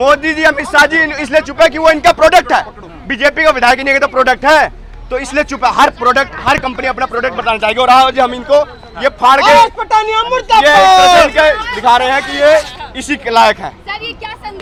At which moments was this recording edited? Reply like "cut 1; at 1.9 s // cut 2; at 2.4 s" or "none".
none